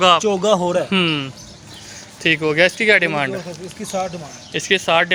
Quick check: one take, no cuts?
yes; 0 cuts

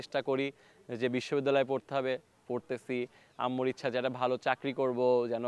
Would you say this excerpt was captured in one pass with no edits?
yes; 0 cuts

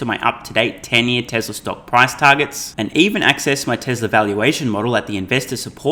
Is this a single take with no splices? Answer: yes; 0 cuts

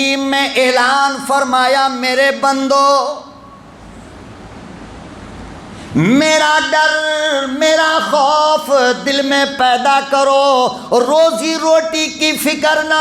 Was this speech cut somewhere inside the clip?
no; 0 cuts

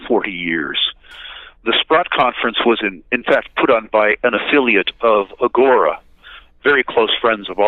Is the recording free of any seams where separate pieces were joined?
no; 1 cut; at 2.1 s

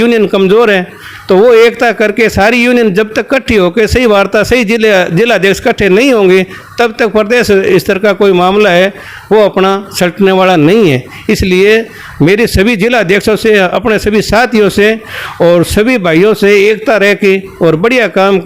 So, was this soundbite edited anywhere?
no; 0 cuts

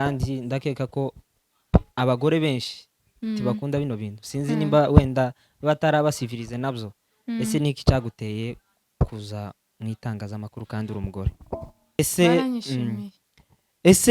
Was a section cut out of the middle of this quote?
yes; 1 cut; at 12.0 s

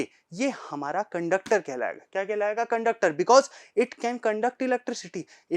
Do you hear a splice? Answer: no; 0 cuts

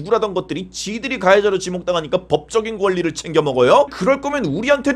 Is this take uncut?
no; 1 cut; at 3.9 s

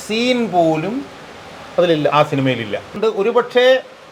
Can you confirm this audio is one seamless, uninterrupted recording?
no; 1 cut; at 2.9 s

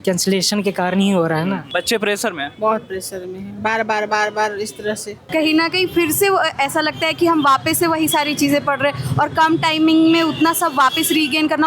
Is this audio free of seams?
no; 2 cuts; at 1.7 s, 5.2 s

